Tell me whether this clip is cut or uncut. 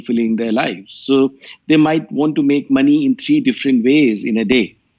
uncut